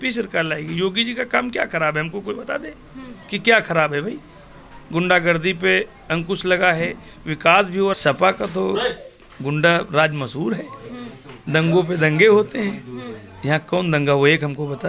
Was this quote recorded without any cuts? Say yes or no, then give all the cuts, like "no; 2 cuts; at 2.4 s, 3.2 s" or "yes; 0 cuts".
no; 1 cut; at 7.9 s